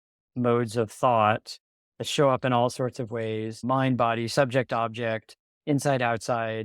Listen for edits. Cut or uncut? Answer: cut